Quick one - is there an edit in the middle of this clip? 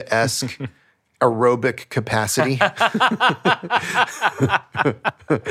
no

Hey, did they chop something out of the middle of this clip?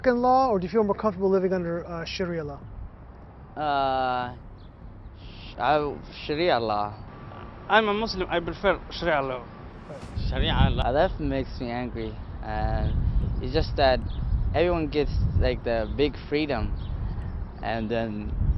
yes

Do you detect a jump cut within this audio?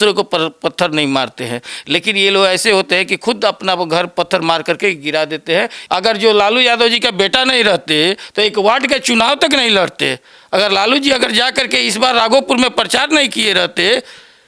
yes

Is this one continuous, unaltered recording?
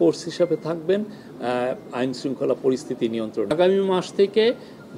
no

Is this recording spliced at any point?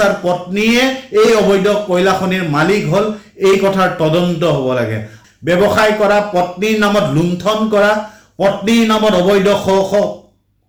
yes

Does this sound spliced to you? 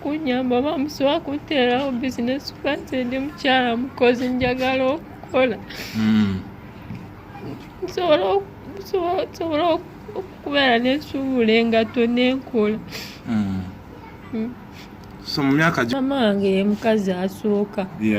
yes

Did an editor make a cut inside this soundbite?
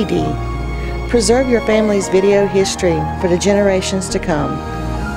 no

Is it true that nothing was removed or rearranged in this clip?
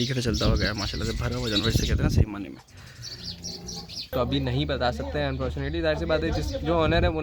no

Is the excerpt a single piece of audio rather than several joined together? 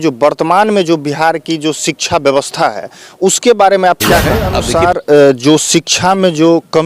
no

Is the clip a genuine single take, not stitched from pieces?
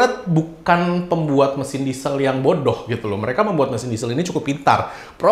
yes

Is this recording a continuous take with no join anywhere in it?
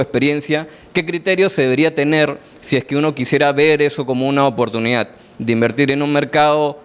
yes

